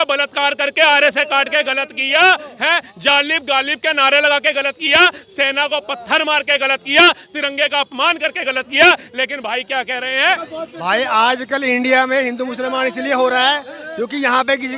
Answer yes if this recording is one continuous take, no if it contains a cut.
no